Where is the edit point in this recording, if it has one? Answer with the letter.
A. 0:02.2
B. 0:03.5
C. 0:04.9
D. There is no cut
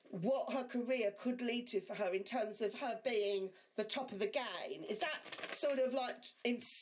D